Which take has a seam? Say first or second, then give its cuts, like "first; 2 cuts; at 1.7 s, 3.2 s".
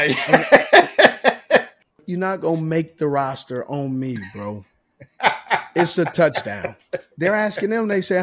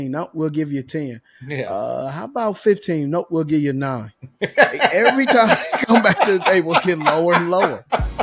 first; 2 cuts; at 1.8 s, 7.1 s